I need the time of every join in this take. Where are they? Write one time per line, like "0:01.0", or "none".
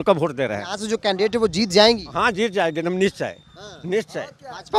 none